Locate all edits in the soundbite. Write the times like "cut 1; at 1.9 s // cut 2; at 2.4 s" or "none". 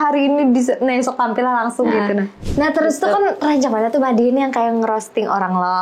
cut 1; at 2.4 s